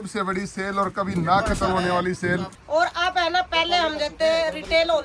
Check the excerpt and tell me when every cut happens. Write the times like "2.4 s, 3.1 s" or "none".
2.5 s

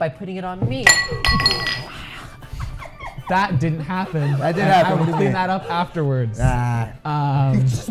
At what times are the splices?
none

